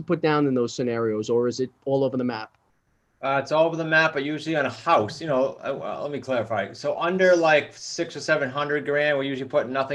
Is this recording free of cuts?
yes; 0 cuts

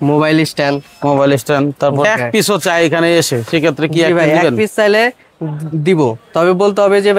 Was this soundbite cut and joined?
yes; 1 cut; at 2.0 s

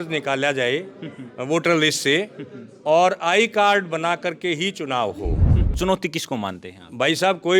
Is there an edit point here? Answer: yes; 1 cut; at 5.6 s

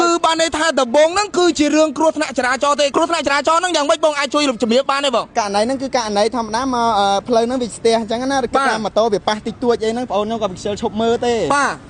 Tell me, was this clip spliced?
yes; 1 cut; at 2.9 s

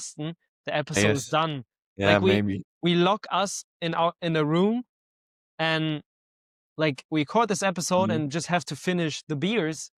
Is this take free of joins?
yes; 0 cuts

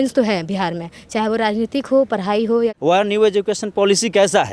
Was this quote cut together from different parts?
yes; 1 cut; at 2.8 s

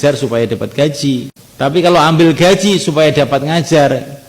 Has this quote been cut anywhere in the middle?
yes; 1 cut; at 1.4 s

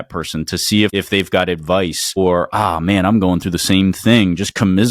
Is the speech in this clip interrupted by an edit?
no; 0 cuts

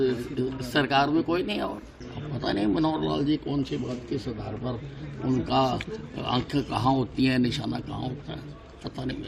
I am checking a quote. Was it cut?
yes; 1 cut; at 1.9 s

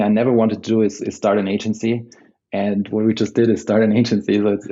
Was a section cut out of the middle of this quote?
no; 0 cuts

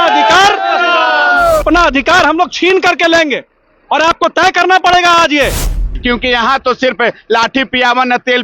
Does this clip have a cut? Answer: yes; 2 cuts; at 1.6 s, 5.9 s

